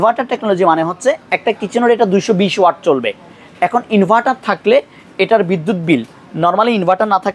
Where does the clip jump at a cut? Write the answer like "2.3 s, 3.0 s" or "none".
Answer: none